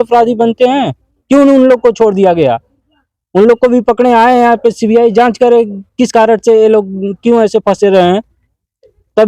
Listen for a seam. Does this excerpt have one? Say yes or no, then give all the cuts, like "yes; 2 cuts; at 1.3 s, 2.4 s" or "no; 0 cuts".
no; 0 cuts